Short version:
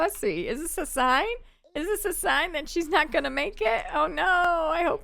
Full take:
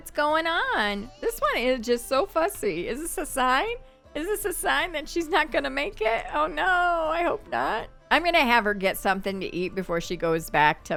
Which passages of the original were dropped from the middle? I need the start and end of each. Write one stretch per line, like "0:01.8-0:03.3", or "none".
none